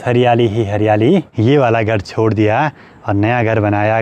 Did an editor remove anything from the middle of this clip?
yes; 1 cut; at 1.3 s

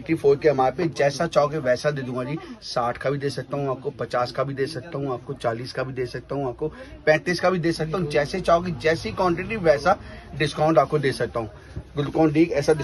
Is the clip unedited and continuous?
yes; 0 cuts

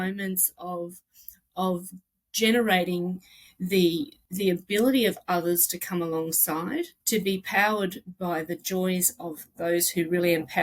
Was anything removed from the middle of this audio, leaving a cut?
yes; 2 cuts; at 4.2 s, 7.0 s

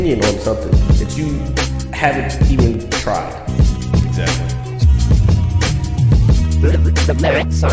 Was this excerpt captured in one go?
yes; 0 cuts

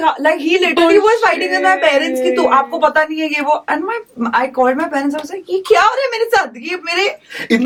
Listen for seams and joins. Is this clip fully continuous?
yes; 0 cuts

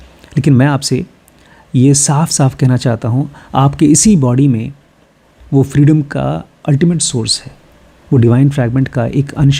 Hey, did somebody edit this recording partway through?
no; 0 cuts

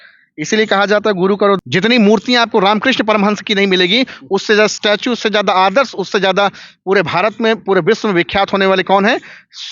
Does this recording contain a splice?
yes; 1 cut; at 1.6 s

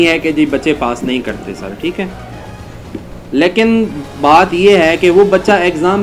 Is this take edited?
no; 0 cuts

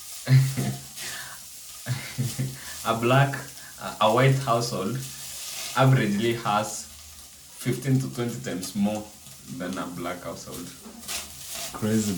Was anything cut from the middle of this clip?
no; 0 cuts

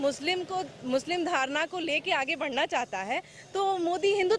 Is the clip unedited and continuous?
yes; 0 cuts

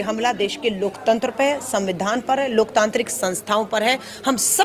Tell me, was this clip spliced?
no; 0 cuts

